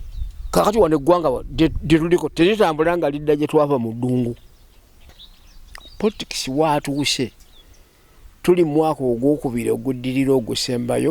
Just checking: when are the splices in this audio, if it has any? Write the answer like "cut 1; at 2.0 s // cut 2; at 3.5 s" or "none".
cut 1; at 5.1 s